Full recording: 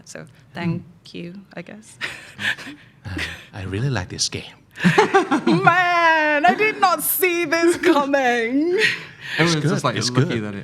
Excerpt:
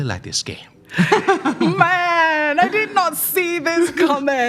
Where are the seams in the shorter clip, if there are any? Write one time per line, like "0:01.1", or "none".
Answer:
none